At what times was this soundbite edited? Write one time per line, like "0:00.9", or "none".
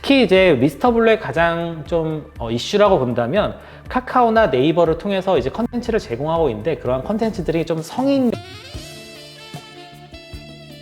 none